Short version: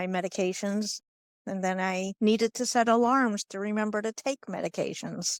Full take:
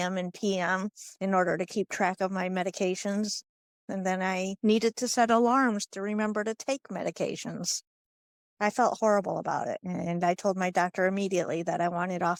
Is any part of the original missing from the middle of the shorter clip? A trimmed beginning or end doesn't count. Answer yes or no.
no